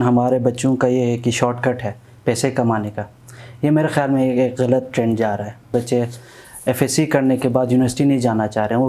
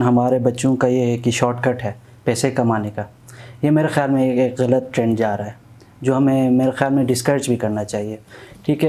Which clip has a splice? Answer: first; 1 cut; at 5.7 s

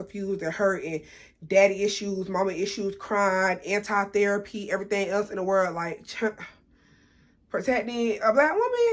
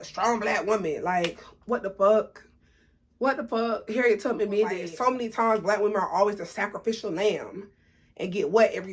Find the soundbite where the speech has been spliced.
second; 1 cut; at 4.8 s

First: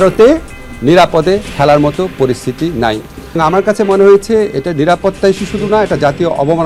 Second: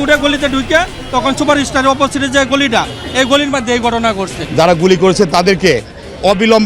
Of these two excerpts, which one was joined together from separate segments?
second; 1 cut; at 4.4 s

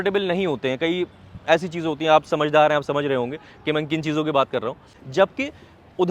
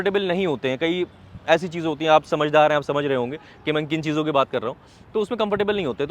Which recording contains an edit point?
first; 1 cut; at 4.9 s

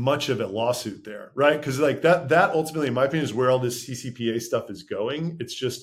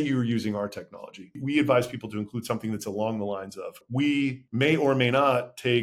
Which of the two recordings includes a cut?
second; 3 cuts; at 1.3 s, 3.8 s, 4.4 s

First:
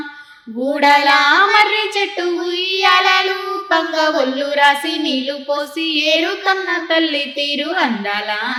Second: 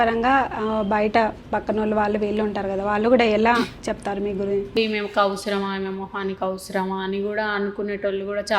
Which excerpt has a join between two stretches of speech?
second; 1 cut; at 4.8 s

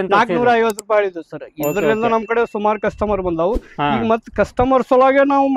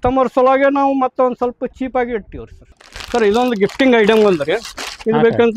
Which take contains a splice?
second; 1 cut; at 2.7 s

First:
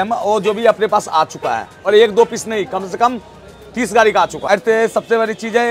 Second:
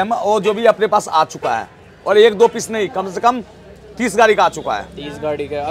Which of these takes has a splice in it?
first; 2 cuts; at 1.7 s, 4.5 s

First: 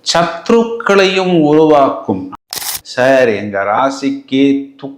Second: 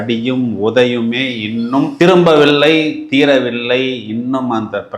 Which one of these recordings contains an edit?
first; 1 cut; at 2.3 s

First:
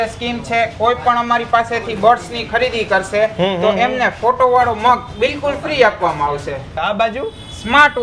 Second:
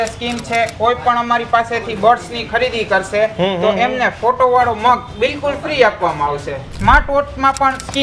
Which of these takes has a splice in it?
second; 1 cut; at 6.7 s

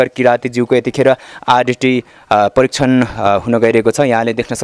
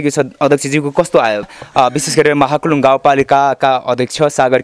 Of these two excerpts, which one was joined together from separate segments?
second; 1 cut; at 1.6 s

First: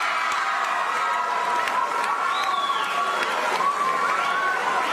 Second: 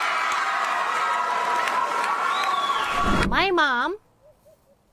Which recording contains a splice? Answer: second; 1 cut; at 3.2 s

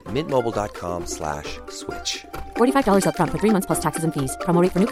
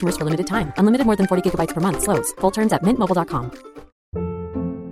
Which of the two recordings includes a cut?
second; 1 cut; at 3.9 s

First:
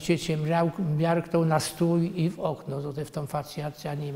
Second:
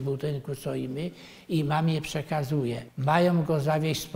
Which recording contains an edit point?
second; 1 cut; at 2.9 s

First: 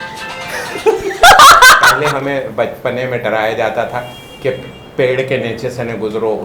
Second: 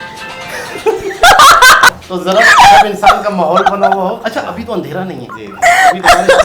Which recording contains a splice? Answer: first; 1 cut; at 2.0 s

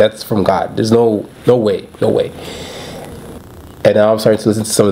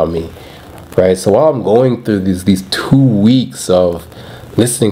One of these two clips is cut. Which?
first; 1 cut; at 3.4 s

